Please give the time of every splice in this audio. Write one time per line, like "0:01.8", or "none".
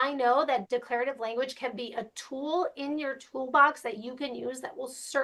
none